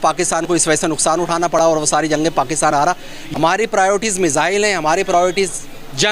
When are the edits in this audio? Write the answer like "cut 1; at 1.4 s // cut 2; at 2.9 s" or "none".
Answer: cut 1; at 3.2 s